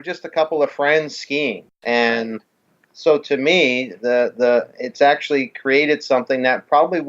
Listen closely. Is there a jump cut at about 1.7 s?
yes; 1 cut; at 1.7 s

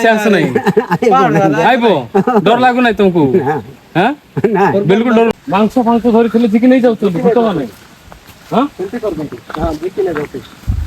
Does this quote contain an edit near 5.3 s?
yes; 1 cut; at 5.3 s

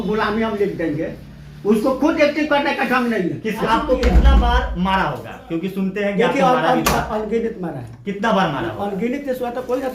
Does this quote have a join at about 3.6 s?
yes; 1 cut; at 3.6 s

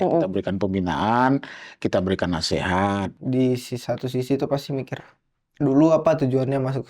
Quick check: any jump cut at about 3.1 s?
yes; 1 cut; at 3.1 s

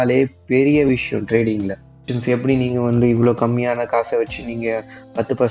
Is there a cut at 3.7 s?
no; 1 cut; at 2.1 s

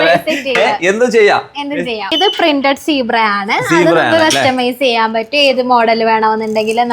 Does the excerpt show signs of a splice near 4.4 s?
no; 1 cut; at 2.1 s

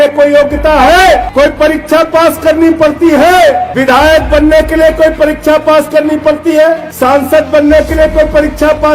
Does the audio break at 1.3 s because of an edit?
yes; 3 cuts; at 1.3 s, 3.7 s, 6.9 s

